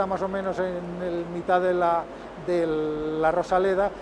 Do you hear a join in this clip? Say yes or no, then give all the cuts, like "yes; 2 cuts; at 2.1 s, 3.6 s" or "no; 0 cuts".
no; 0 cuts